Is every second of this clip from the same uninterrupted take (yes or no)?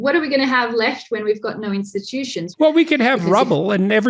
no